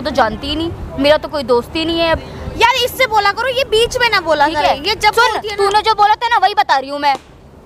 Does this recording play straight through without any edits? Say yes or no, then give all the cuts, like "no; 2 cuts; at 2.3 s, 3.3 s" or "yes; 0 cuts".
yes; 0 cuts